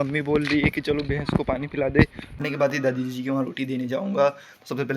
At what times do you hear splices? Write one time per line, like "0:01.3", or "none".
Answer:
0:02.4